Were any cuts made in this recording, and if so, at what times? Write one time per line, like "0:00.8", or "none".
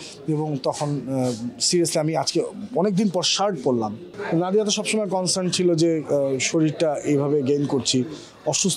0:04.1